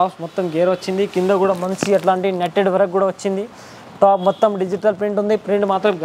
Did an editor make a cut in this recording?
no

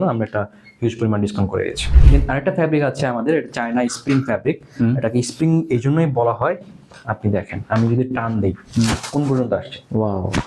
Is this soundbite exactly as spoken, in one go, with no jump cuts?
no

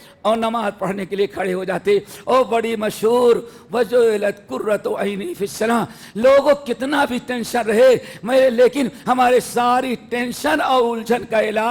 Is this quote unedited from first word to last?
yes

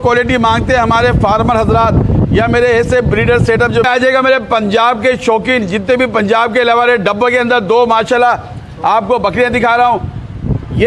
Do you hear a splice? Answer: yes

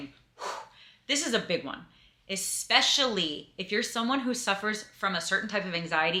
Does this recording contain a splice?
no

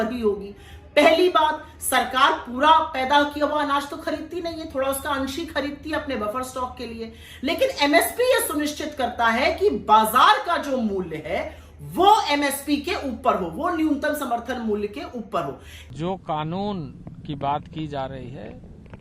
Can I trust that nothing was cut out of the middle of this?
no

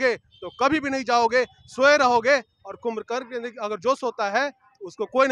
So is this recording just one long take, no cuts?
yes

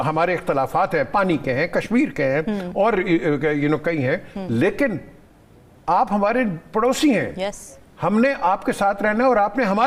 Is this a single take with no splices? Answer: yes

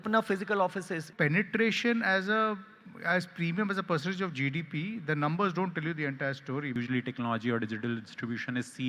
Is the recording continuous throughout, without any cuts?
no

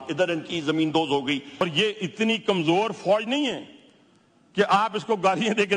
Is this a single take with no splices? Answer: no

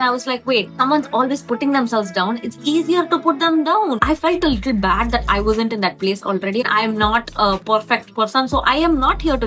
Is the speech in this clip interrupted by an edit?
yes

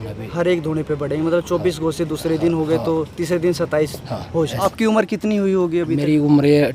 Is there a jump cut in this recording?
yes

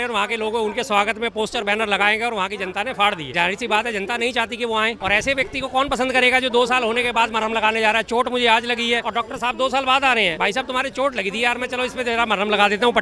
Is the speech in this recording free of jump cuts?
no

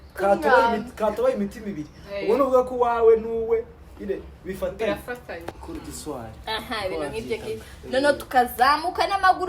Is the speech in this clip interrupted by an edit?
yes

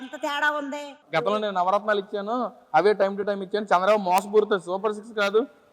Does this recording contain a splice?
yes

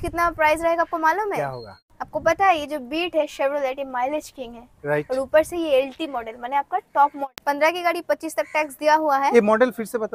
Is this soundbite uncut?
no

